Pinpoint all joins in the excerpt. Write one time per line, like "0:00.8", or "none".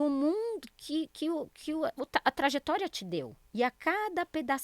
0:03.4